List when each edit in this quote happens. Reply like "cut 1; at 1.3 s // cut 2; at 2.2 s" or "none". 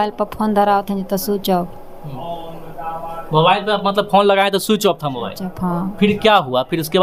none

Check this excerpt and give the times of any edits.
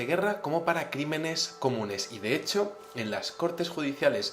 cut 1; at 1.4 s

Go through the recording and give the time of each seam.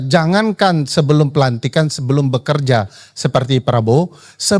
none

